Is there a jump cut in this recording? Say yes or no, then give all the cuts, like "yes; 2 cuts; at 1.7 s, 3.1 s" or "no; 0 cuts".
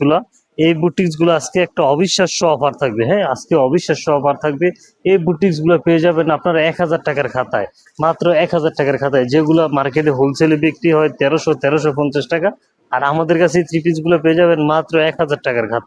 no; 0 cuts